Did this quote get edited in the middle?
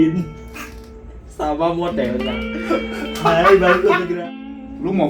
yes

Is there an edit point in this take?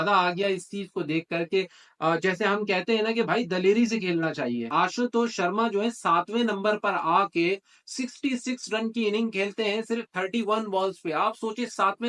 yes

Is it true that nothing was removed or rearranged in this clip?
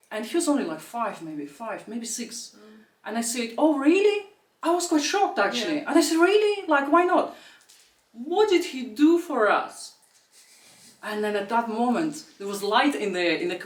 yes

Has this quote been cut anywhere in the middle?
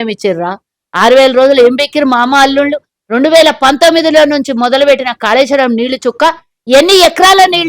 no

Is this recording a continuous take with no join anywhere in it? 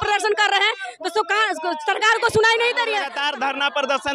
no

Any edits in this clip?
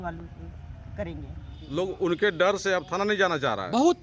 yes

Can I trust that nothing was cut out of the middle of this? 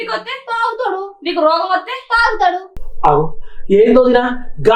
no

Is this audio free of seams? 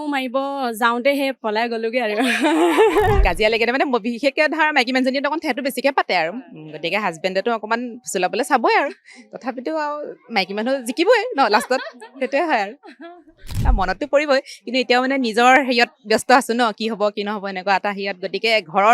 no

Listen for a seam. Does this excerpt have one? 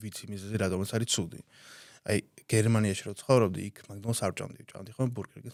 no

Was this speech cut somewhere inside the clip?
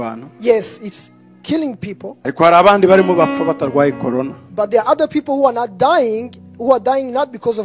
no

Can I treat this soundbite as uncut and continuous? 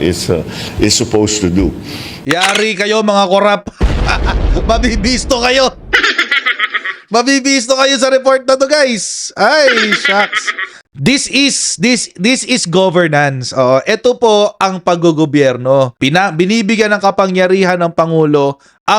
no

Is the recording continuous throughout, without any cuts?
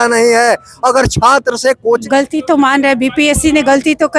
no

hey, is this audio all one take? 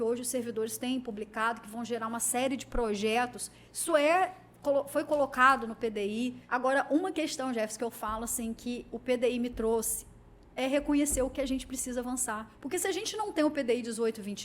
no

